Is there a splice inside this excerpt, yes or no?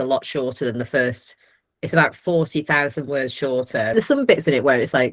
yes